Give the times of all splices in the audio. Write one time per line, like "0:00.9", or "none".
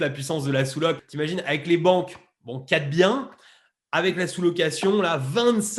0:01.1